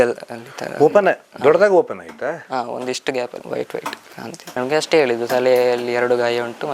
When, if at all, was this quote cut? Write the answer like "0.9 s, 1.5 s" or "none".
3.4 s, 4.4 s

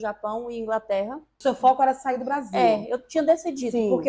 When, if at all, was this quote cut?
1.3 s

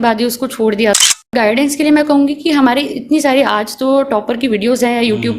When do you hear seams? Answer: 1.3 s

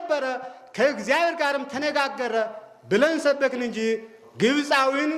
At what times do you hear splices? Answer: none

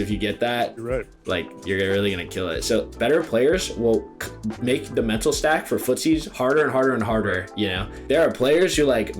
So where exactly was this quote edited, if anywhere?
2.9 s, 7.9 s

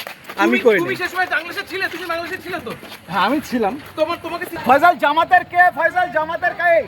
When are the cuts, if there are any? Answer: 4.5 s

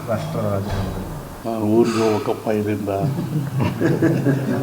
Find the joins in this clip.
1.3 s

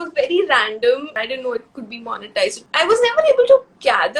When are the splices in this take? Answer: 1.1 s, 2.6 s

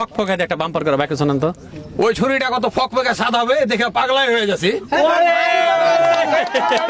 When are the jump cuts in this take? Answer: 1.8 s

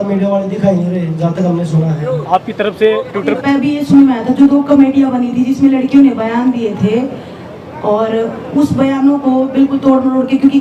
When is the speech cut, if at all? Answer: 3.4 s

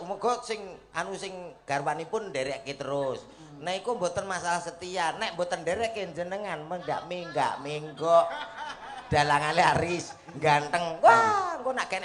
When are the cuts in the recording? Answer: none

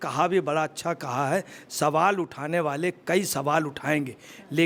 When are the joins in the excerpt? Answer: none

